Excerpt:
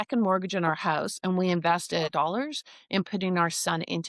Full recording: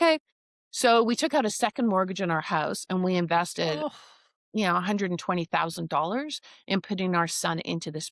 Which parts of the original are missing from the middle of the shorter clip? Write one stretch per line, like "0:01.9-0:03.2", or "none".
0:03.8-0:05.9